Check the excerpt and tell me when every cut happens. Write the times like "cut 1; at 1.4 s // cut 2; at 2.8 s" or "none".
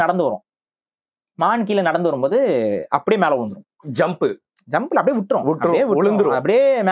none